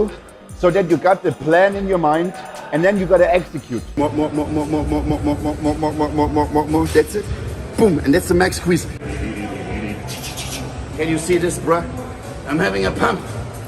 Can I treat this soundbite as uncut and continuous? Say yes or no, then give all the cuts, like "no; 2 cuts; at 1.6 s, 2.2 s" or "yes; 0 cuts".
no; 2 cuts; at 3.9 s, 8.9 s